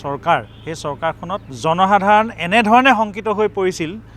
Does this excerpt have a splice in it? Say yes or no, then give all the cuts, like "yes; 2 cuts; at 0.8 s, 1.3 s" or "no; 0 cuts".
yes; 1 cut; at 1.5 s